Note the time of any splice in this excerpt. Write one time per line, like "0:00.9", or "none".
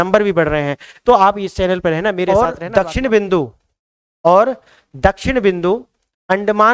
0:02.2